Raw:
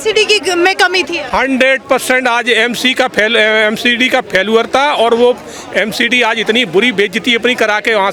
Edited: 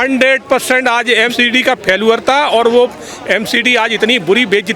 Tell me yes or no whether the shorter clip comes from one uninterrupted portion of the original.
no